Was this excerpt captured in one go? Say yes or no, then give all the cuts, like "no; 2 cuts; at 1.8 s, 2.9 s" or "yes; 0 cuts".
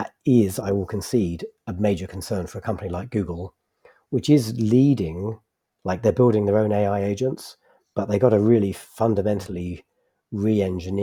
yes; 0 cuts